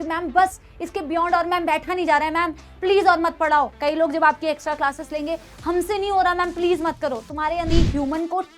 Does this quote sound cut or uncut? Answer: cut